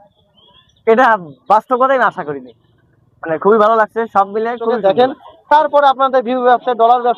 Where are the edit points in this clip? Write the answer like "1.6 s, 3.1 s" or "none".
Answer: 4.8 s